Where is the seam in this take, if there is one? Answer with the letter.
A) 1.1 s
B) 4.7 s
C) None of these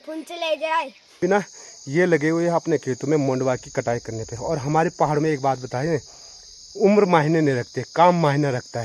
A